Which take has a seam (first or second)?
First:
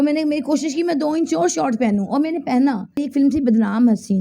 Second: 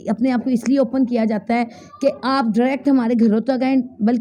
first